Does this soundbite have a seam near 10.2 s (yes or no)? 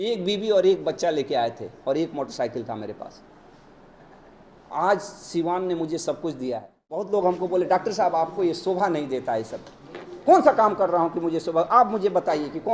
no